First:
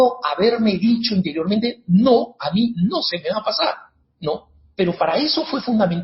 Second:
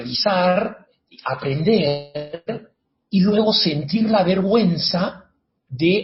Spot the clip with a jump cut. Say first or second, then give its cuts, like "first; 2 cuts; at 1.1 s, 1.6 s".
first; 1 cut; at 4.4 s